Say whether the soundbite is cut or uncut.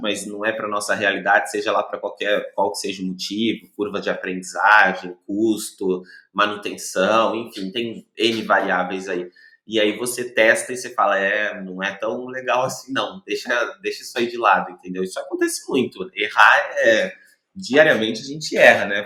uncut